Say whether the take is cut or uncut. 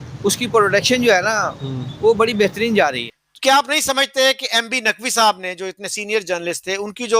cut